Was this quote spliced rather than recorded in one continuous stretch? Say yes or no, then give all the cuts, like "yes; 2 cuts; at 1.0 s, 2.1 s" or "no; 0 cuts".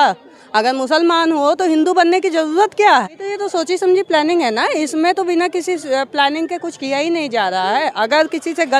yes; 1 cut; at 3.2 s